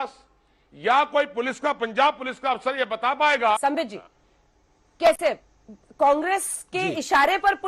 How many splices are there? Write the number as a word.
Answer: one